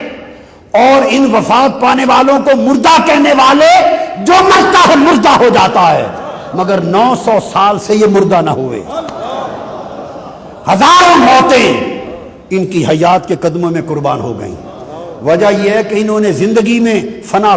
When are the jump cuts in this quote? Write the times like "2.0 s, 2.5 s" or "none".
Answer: none